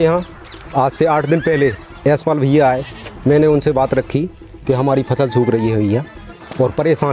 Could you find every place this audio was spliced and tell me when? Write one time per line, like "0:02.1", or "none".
none